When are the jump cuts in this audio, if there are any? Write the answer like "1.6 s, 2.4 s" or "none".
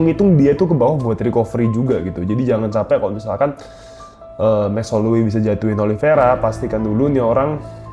none